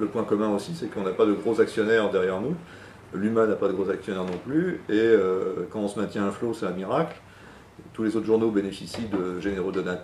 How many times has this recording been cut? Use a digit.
1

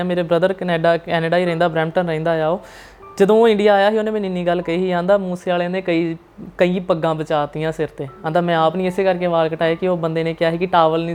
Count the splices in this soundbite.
0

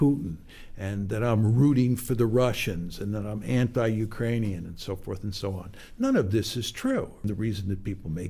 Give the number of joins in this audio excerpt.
1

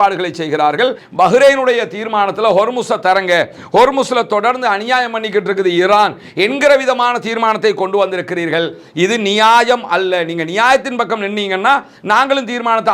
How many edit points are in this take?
1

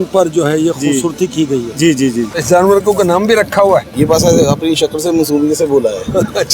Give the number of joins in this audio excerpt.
2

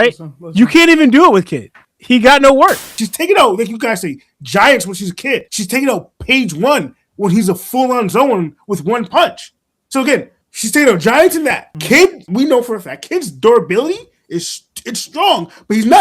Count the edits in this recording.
1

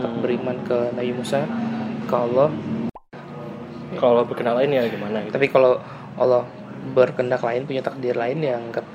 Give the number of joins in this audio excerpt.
1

